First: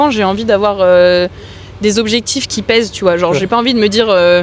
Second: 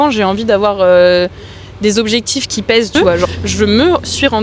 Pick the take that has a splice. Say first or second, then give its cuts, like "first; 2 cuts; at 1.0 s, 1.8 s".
second; 1 cut; at 3.3 s